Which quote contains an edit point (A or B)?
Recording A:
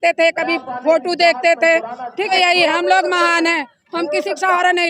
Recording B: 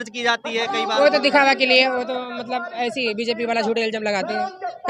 A